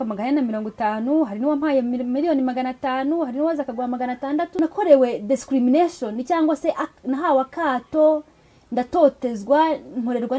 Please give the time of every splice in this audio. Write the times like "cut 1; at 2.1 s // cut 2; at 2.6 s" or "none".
cut 1; at 4.5 s